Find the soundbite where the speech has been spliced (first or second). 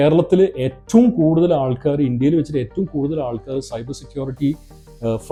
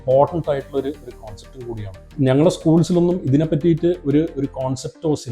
second